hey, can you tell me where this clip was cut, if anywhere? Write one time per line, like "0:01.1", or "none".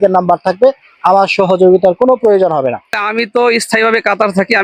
0:03.0